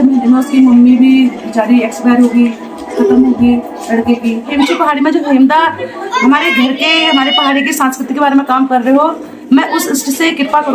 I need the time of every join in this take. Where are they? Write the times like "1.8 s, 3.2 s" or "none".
4.5 s